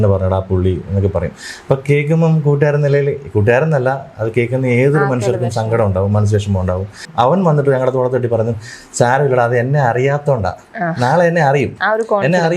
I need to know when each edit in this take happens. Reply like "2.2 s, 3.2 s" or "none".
7.0 s